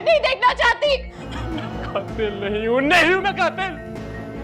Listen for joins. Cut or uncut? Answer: cut